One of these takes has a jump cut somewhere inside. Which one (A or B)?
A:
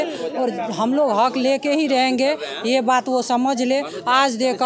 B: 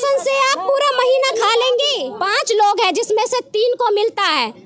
B